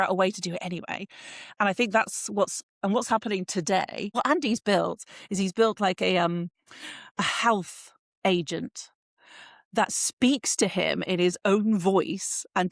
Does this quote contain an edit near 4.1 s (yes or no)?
yes